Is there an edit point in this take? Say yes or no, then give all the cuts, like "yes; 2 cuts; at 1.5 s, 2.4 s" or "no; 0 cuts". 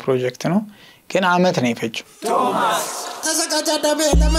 yes; 1 cut; at 2.1 s